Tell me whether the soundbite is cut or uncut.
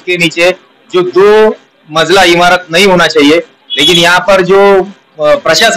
uncut